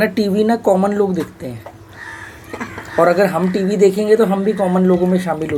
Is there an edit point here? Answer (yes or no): no